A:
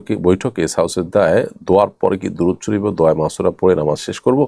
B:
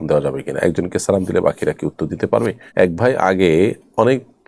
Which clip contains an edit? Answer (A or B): B